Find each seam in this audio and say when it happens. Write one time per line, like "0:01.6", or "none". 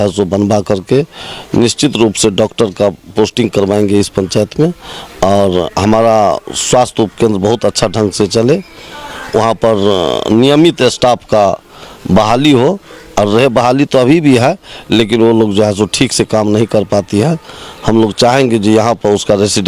none